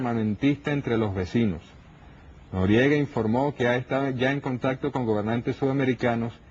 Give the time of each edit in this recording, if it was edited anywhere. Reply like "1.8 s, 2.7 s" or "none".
4.8 s